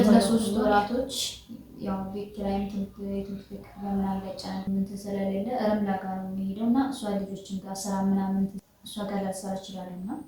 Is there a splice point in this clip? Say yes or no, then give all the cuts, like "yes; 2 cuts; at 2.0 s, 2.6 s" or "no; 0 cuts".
yes; 2 cuts; at 4.7 s, 8.6 s